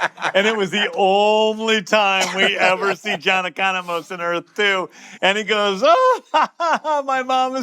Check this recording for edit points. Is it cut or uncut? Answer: cut